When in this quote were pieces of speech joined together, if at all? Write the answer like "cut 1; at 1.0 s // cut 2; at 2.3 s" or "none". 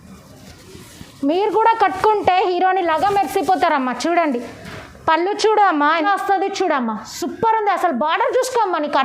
cut 1; at 6.1 s